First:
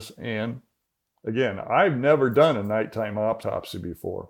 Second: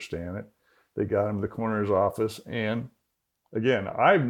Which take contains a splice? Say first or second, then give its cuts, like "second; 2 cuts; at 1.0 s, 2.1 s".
first; 1 cut; at 3.4 s